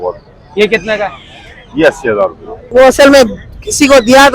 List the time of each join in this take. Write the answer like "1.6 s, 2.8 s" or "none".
2.6 s